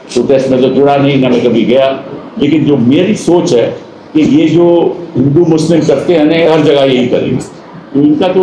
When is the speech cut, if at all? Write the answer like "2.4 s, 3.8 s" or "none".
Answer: none